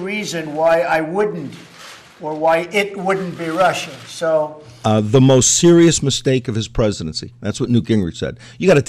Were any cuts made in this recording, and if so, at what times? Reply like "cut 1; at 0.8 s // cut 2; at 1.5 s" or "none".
cut 1; at 4.6 s